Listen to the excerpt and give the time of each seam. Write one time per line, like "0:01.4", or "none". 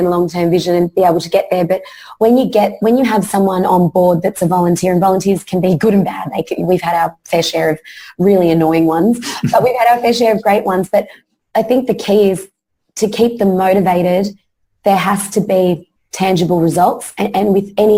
none